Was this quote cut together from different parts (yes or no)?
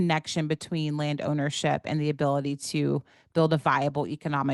no